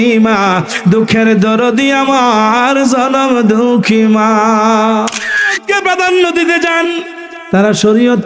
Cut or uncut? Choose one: cut